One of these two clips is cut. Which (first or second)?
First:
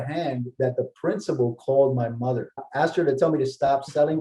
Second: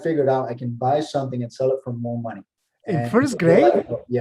first